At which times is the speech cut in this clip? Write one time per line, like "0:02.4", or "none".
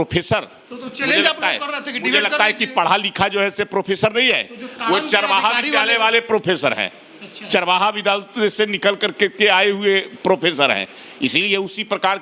none